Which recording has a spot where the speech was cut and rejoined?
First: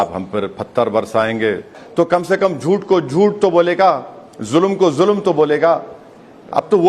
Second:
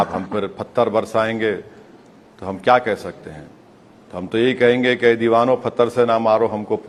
first; 1 cut; at 1.8 s

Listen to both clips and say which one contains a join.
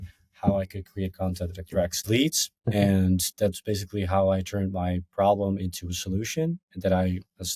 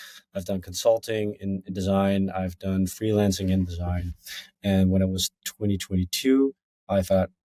first; 1 cut; at 2.5 s

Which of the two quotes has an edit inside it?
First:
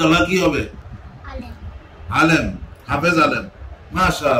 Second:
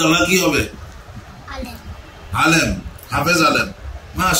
first; 1 cut; at 0.9 s

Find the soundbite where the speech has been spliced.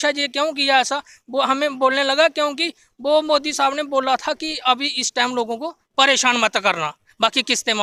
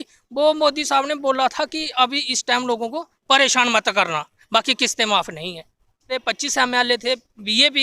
second; 1 cut; at 6.2 s

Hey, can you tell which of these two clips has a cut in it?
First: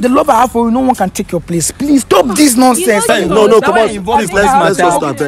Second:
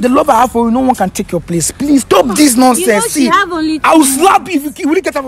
first; 1 cut; at 3.1 s

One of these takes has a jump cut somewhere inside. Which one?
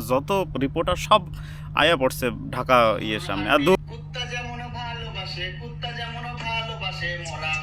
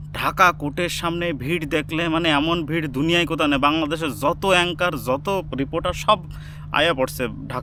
first; 1 cut; at 3.8 s

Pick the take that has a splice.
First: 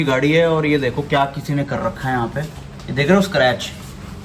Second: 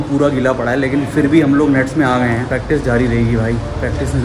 second; 1 cut; at 2.5 s

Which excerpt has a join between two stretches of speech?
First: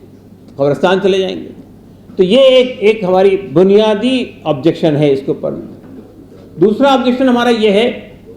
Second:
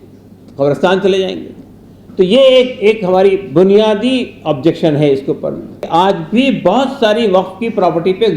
second; 1 cut; at 5.8 s

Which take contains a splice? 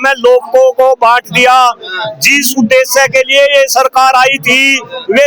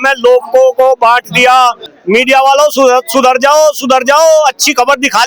second; 1 cut; at 1.9 s

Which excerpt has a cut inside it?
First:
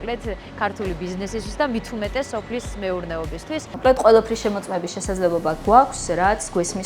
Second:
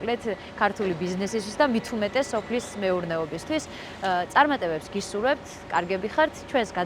first; 1 cut; at 3.7 s

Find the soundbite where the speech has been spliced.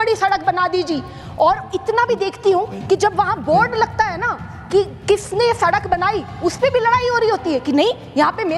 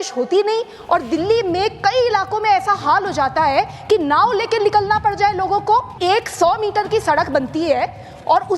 second; 1 cut; at 6.0 s

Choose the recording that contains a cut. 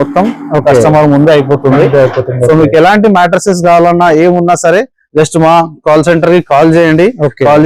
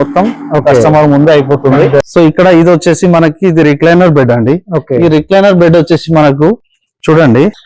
second; 1 cut; at 2.0 s

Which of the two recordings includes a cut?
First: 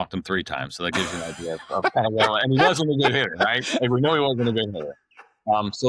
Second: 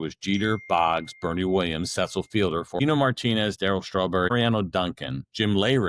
second; 2 cuts; at 2.8 s, 4.3 s

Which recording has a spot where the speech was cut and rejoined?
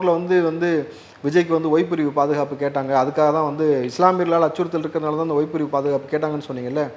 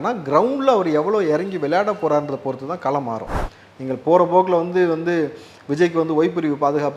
second; 1 cut; at 3.3 s

